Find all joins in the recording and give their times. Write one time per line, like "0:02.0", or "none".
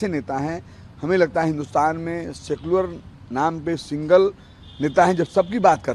none